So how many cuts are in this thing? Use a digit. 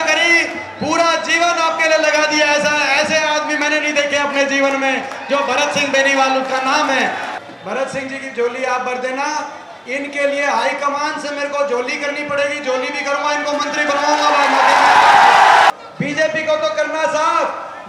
2